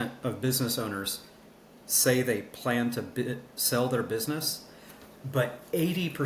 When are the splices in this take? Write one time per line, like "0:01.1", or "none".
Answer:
none